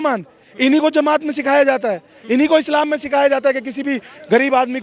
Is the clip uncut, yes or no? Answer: yes